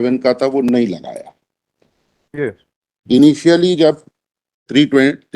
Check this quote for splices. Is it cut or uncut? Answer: uncut